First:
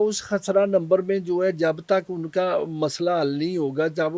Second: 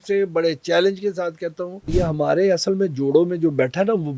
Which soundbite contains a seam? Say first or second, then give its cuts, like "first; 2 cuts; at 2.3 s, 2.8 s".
second; 1 cut; at 1.8 s